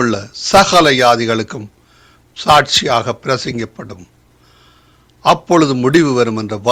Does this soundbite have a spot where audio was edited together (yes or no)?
no